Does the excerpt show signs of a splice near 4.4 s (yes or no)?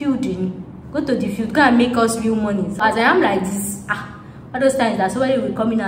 no